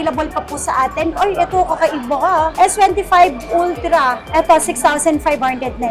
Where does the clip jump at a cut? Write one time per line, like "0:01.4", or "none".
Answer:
0:01.1
0:02.5
0:04.2